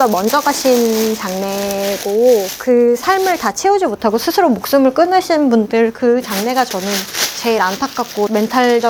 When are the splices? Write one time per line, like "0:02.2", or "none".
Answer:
none